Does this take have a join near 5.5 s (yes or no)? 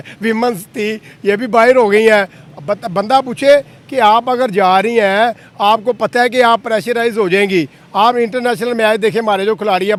no